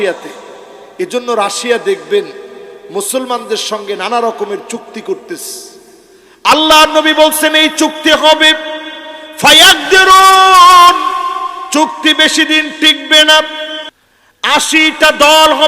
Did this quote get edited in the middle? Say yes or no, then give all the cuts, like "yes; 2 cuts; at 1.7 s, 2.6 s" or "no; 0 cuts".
yes; 1 cut; at 13.8 s